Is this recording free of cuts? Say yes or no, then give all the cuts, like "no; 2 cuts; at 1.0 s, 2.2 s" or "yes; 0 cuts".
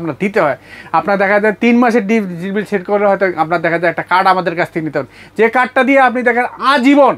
yes; 0 cuts